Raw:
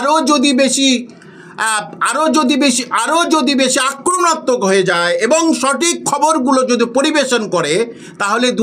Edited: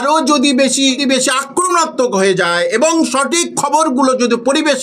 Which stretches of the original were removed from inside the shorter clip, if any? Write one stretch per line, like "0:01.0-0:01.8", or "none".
0:01.0-0:03.5